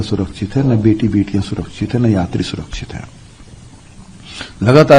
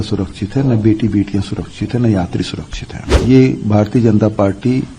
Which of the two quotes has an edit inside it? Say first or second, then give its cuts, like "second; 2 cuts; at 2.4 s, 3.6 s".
second; 1 cut; at 3.1 s